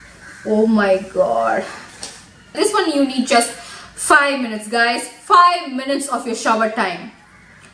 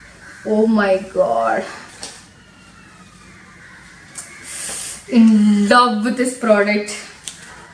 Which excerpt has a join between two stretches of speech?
first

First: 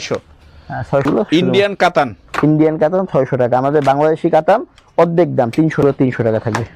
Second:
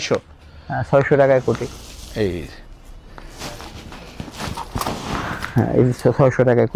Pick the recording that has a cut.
first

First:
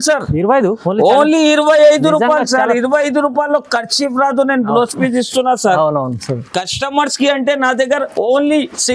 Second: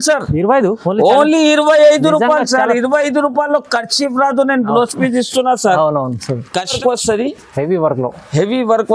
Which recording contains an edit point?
second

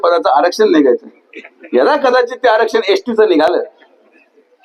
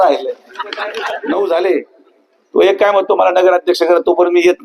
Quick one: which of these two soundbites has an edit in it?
second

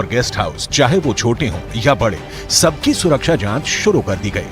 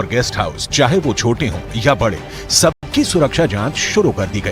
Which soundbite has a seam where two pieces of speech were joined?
first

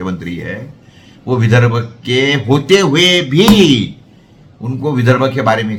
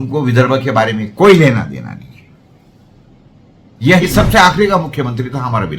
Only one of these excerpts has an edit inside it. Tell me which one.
second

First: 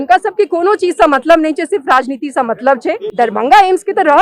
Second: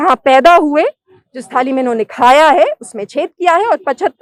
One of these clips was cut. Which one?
first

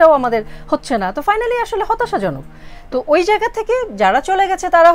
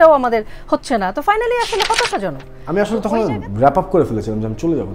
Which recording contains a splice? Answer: second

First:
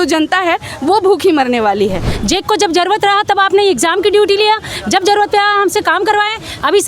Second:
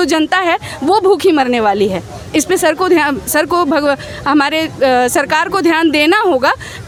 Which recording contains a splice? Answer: first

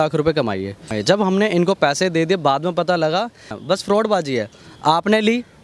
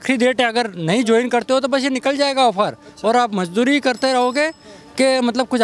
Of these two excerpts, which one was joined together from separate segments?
first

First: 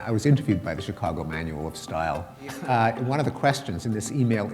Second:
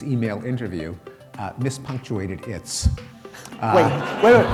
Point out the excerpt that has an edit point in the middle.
first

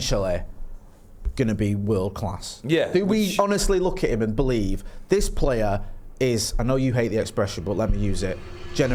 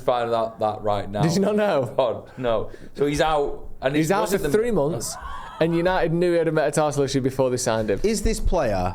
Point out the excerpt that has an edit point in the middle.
second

